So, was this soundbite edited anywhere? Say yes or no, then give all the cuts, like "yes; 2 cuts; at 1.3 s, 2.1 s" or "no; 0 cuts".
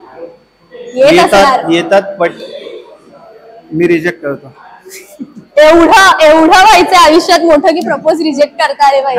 no; 0 cuts